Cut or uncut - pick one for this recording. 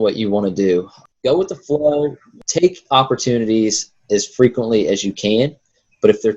cut